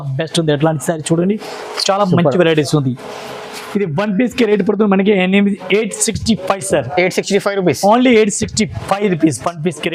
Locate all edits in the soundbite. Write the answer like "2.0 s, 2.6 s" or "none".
none